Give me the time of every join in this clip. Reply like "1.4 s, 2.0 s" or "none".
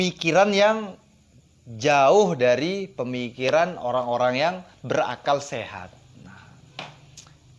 none